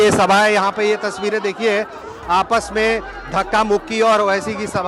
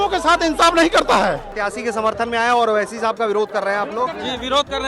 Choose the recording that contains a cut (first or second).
second